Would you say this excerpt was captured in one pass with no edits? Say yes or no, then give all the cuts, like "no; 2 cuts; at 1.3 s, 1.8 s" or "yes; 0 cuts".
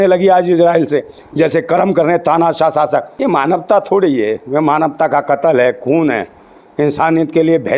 no; 1 cut; at 3.1 s